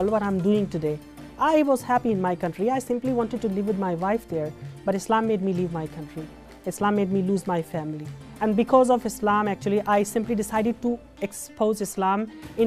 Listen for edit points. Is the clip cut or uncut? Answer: uncut